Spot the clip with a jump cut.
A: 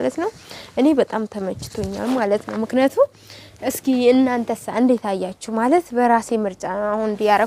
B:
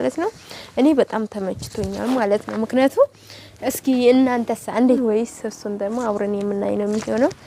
B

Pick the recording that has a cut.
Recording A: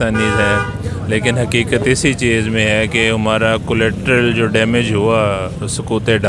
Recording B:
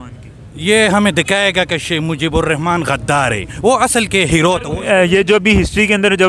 B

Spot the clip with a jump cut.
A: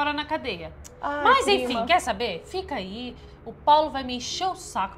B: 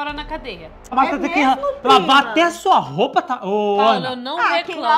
B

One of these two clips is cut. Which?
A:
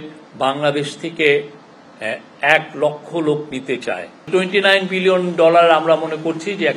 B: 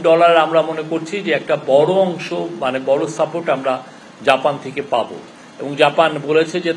A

